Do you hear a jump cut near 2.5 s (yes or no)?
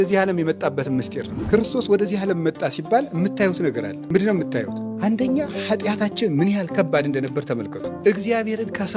no